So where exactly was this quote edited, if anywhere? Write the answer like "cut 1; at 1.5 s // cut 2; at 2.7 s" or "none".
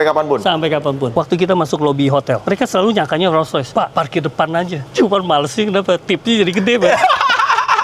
cut 1; at 1.1 s // cut 2; at 2.4 s // cut 3; at 4.9 s